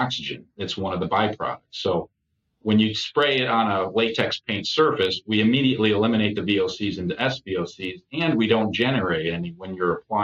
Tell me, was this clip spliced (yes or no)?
no